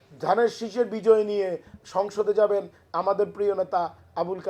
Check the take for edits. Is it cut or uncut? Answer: uncut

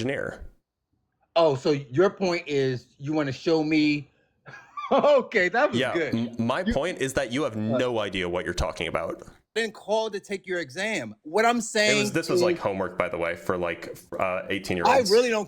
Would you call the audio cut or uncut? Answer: cut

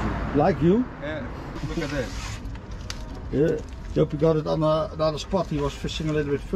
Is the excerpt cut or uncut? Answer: cut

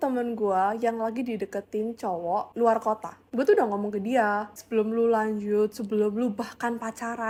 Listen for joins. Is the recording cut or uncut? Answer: uncut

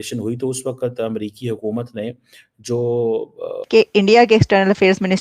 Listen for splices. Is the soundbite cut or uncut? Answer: cut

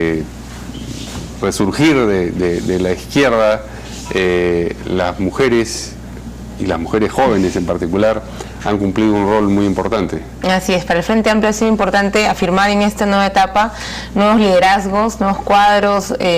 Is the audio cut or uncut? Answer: cut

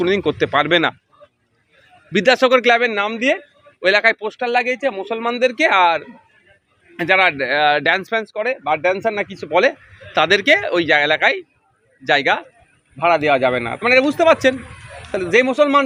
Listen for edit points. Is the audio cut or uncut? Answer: uncut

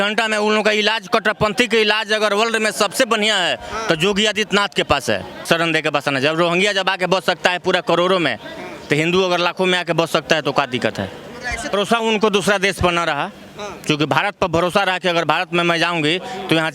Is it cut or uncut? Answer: cut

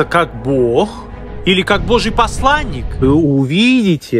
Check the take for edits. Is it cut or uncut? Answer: cut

